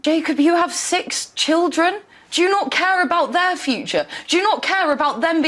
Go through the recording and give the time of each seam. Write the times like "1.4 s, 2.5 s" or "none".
none